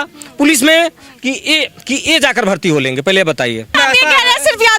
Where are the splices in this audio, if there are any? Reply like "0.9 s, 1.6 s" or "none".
3.7 s